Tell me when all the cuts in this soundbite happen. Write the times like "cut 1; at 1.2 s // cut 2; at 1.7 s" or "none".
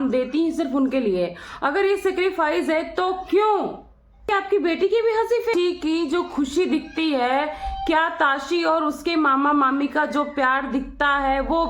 cut 1; at 4.3 s // cut 2; at 5.5 s